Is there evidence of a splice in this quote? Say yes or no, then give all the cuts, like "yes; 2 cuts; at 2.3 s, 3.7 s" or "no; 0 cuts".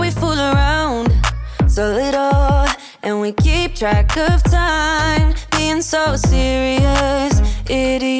no; 0 cuts